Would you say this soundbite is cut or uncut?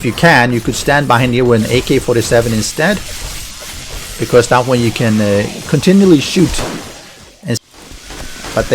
cut